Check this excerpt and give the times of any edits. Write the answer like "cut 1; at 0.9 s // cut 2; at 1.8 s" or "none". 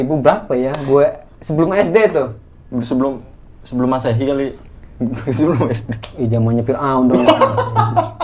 none